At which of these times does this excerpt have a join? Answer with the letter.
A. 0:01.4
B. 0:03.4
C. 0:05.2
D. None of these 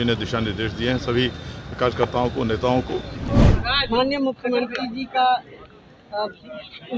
B